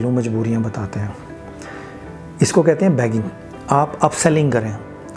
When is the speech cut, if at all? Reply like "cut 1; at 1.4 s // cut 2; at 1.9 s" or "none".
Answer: none